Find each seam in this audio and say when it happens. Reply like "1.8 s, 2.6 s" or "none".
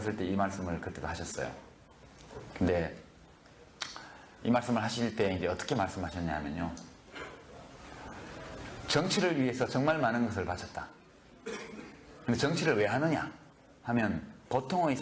none